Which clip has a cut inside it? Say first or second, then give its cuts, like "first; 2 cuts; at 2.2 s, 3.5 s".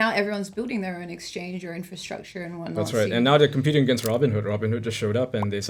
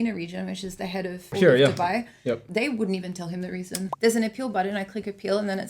second; 3 cuts; at 1.3 s, 2.4 s, 3.8 s